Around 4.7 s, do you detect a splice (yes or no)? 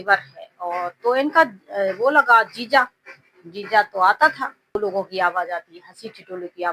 yes